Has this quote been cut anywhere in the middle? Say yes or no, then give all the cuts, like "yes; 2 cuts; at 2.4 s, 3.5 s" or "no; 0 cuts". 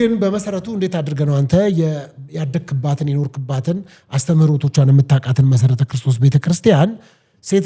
no; 0 cuts